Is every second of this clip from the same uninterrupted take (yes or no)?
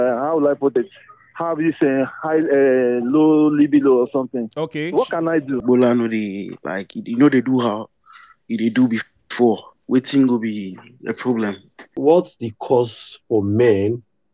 no